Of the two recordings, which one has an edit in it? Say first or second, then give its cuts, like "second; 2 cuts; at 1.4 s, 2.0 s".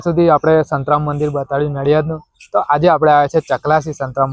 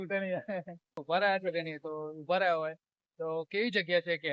second; 1 cut; at 1.0 s